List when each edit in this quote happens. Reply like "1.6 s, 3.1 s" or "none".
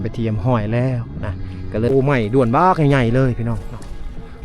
1.9 s